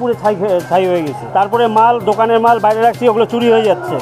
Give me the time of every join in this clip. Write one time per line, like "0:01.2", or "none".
0:01.2